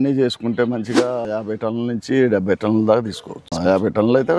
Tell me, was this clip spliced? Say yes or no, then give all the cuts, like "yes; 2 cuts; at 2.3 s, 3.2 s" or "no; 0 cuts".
yes; 2 cuts; at 1.2 s, 3.5 s